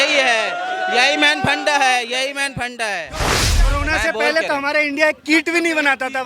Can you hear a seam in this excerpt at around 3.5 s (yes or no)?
yes